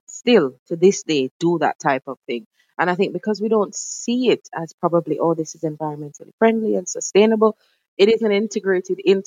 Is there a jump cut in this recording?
no; 0 cuts

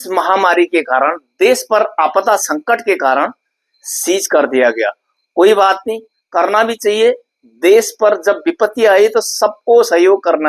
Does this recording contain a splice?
no; 0 cuts

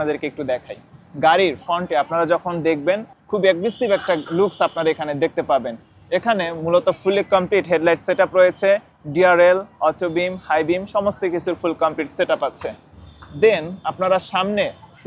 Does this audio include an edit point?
no; 0 cuts

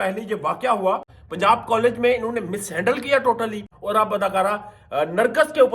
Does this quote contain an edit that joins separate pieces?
yes; 2 cuts; at 1.1 s, 3.7 s

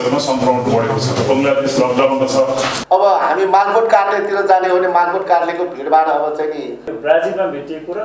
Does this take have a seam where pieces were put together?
yes; 2 cuts; at 2.8 s, 6.8 s

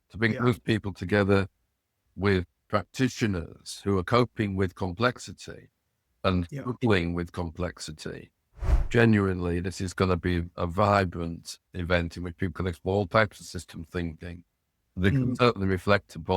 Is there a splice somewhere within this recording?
yes; 3 cuts; at 2.1 s, 8.8 s, 11.7 s

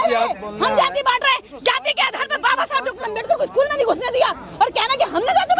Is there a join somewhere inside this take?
no; 0 cuts

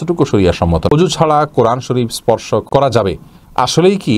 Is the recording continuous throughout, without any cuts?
no; 2 cuts; at 0.9 s, 2.6 s

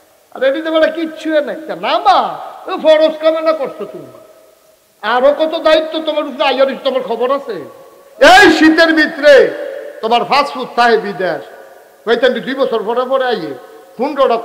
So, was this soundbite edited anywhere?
no; 0 cuts

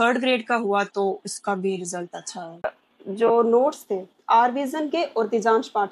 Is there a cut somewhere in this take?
yes; 1 cut; at 2.8 s

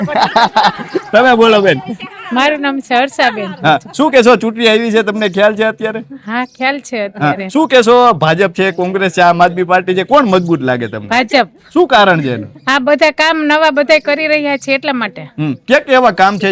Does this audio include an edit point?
no; 0 cuts

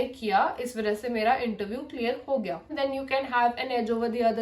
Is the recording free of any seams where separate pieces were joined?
no; 1 cut; at 2.7 s

